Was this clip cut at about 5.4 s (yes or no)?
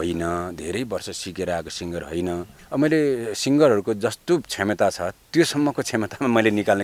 no